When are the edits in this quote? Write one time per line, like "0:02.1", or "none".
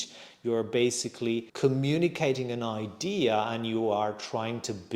0:01.5